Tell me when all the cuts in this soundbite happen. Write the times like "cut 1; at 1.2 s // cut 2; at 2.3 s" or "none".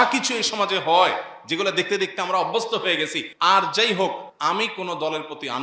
cut 1; at 3.2 s // cut 2; at 4.3 s